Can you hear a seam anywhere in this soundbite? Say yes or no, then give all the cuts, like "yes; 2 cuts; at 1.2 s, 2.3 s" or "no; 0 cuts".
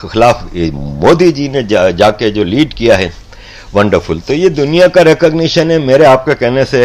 no; 0 cuts